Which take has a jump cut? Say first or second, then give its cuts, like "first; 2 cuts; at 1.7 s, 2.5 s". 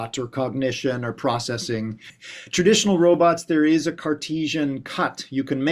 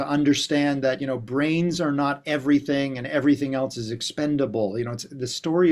first; 1 cut; at 2.0 s